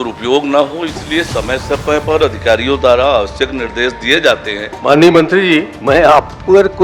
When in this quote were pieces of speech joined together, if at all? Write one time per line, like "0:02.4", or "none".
0:04.7
0:05.7